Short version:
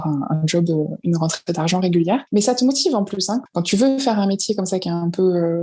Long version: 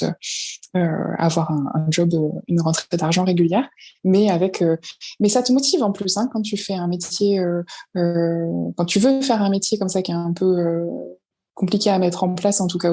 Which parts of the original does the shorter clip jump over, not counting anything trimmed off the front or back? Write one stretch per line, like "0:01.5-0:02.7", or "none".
0:03.7-0:05.1
0:06.3-0:08.7